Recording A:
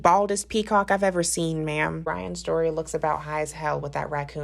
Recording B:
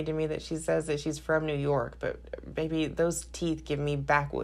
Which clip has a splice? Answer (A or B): A